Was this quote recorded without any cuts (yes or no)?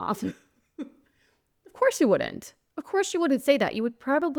yes